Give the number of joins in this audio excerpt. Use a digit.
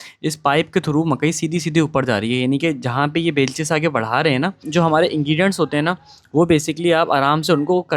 1